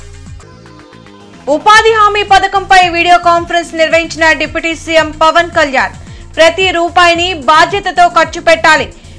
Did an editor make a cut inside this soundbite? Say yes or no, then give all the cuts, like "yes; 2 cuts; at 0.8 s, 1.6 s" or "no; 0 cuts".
yes; 1 cut; at 1.3 s